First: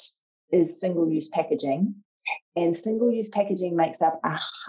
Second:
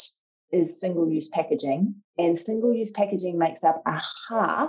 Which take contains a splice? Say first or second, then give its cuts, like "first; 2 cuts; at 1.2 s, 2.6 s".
second; 1 cut; at 2.0 s